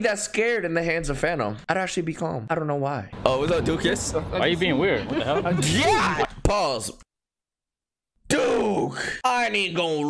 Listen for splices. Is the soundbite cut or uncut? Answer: cut